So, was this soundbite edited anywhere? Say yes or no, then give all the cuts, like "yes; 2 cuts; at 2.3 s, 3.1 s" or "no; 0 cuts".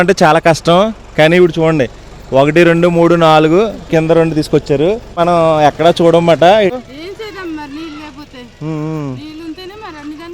yes; 2 cuts; at 5.2 s, 6.7 s